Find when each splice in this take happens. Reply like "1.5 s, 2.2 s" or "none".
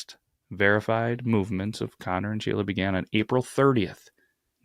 none